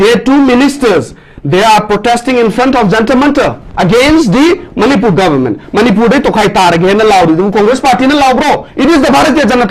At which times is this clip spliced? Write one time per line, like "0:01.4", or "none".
none